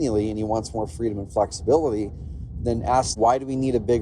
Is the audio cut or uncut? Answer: cut